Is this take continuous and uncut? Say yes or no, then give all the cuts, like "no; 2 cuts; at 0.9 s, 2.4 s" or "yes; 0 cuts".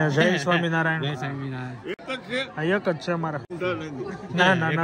no; 1 cut; at 3.5 s